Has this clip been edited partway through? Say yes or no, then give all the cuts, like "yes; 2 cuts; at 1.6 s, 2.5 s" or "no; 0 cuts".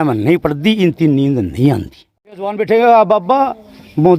yes; 1 cut; at 2.6 s